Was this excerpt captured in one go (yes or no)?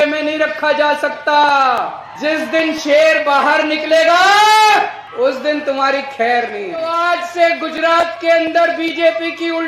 no